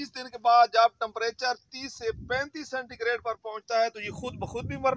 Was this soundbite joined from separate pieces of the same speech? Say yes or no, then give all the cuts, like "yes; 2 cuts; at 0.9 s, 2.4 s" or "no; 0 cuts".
no; 0 cuts